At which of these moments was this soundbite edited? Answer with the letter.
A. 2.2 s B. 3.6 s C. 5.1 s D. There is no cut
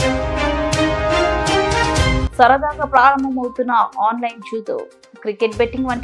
A